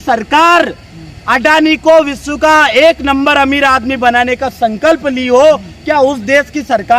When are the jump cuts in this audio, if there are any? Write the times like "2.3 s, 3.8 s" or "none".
none